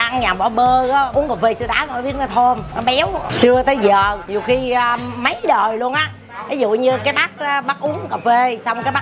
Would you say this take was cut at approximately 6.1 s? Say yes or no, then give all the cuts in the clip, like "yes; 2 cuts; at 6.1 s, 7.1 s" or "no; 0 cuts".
no; 3 cuts; at 1.1 s, 3.0 s, 4.2 s